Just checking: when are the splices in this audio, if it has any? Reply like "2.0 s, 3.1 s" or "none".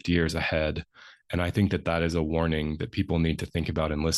none